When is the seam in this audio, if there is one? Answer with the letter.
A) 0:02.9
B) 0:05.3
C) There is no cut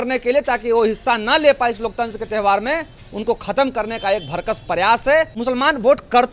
B